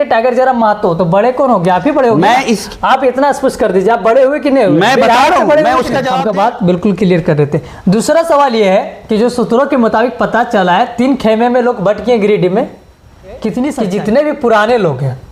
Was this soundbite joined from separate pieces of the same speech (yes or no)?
yes